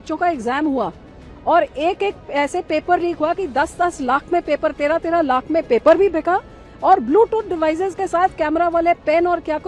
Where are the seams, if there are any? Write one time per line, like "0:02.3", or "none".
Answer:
none

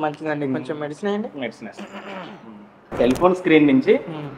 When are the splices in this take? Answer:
0:02.9

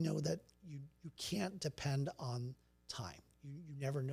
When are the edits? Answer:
none

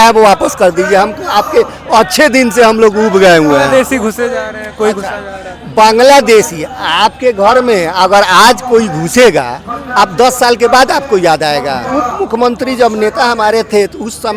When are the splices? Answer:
0:03.6
0:11.9

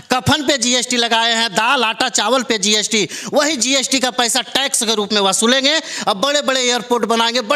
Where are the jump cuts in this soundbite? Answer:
none

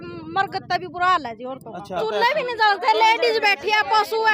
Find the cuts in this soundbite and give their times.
0:02.0

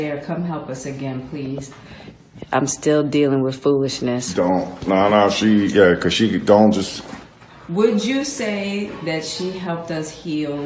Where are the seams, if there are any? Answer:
0:06.7
0:09.5

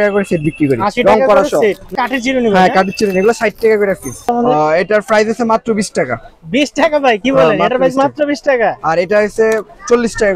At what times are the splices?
0:01.9
0:04.3

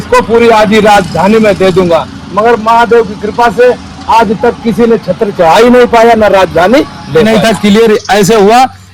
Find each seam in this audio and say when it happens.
0:07.2

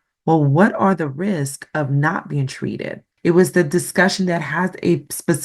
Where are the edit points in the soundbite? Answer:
0:03.0

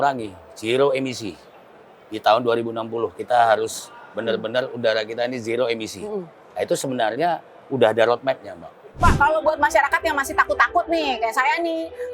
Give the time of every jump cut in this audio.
0:08.8

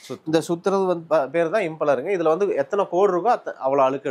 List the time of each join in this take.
none

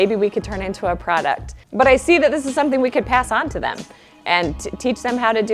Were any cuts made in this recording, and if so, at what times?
none

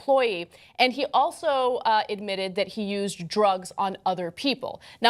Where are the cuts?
0:03.3

